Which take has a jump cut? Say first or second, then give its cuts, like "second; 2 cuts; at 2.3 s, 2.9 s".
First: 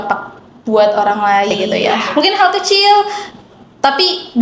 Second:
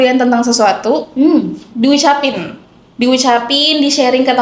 first; 1 cut; at 1.6 s